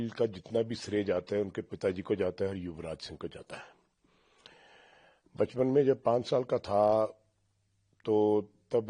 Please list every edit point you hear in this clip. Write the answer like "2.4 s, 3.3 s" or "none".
none